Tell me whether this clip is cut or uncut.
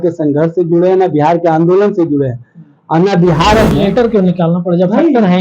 cut